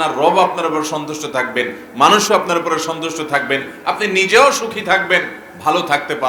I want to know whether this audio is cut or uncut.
uncut